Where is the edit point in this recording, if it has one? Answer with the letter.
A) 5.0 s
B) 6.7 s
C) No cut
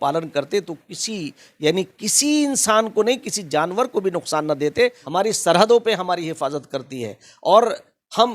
A